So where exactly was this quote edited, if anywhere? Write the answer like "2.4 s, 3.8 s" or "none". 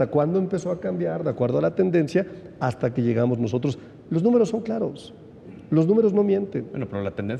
none